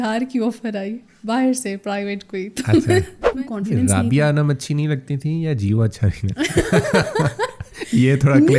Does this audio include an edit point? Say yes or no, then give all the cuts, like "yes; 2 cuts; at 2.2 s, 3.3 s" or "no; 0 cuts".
yes; 1 cut; at 3.3 s